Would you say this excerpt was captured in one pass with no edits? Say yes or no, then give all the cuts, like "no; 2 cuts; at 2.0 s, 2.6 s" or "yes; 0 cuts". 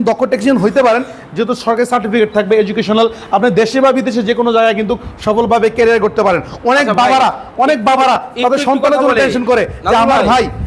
yes; 0 cuts